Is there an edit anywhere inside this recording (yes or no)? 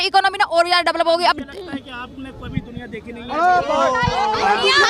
no